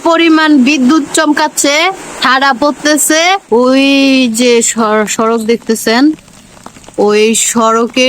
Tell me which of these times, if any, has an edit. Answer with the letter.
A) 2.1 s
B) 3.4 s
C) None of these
B